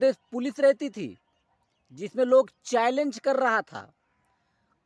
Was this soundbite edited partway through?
no; 0 cuts

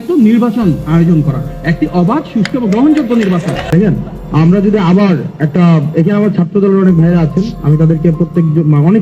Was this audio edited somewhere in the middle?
yes; 1 cut; at 3.6 s

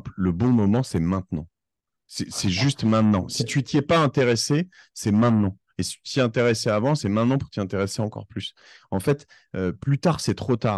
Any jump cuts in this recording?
no; 0 cuts

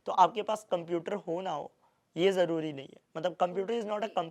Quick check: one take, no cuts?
yes; 0 cuts

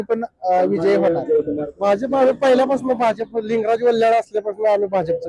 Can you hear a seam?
yes; 1 cut; at 1.7 s

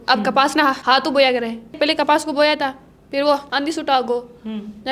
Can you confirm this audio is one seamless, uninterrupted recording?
no; 2 cuts; at 1.7 s, 3.5 s

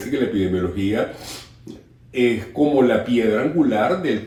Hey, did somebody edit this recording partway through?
no; 0 cuts

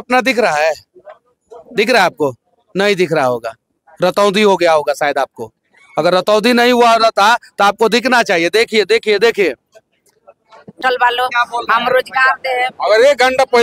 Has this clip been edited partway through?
yes; 1 cut; at 10.8 s

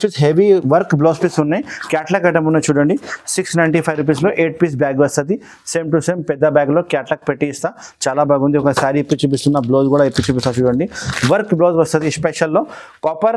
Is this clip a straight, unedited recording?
yes; 0 cuts

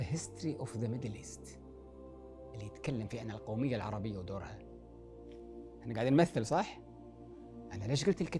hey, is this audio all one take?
no; 2 cuts; at 1.2 s, 2.6 s

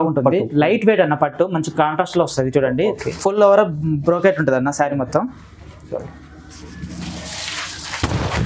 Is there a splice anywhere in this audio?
no; 0 cuts

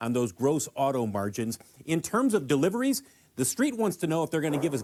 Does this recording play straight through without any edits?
yes; 0 cuts

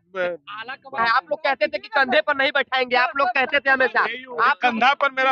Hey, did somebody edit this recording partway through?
yes; 1 cut; at 1.0 s

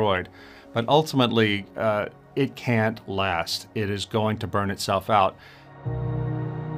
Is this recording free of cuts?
no; 1 cut; at 5.5 s

